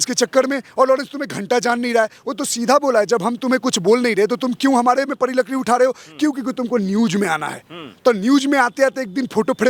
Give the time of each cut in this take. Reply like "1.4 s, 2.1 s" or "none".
none